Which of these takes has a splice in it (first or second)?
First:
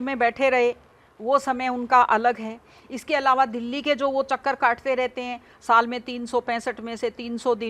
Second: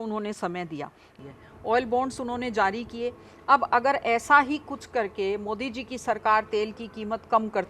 second